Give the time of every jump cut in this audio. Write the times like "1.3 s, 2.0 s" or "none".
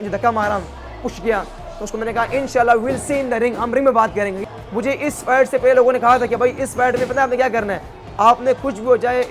4.4 s